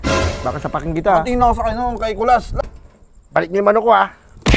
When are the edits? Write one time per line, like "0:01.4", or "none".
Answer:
0:02.5